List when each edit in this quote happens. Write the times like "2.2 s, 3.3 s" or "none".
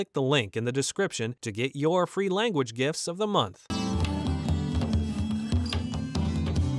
3.7 s

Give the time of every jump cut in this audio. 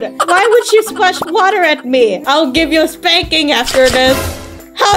1.2 s

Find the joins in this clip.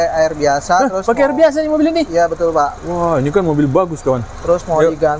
none

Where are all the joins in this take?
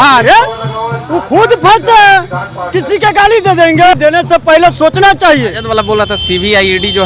3.9 s, 5.6 s

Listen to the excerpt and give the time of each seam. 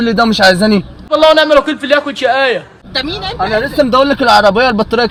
none

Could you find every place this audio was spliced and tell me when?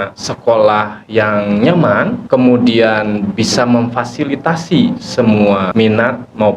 2.2 s, 5.7 s

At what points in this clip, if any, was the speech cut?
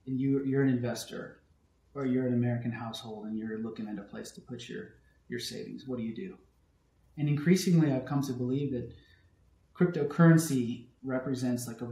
11.0 s

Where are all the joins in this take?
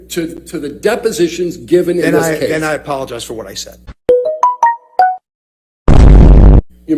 none

